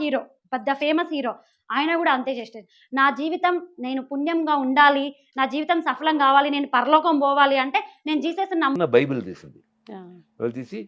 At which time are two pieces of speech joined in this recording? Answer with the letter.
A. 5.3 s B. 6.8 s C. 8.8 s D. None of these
C